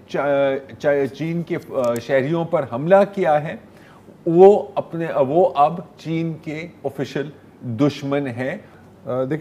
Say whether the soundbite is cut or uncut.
uncut